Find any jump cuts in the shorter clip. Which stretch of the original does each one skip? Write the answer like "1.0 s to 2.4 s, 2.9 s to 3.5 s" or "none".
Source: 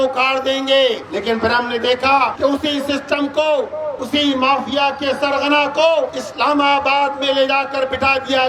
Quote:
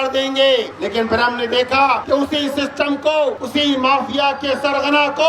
3.7 s to 4.0 s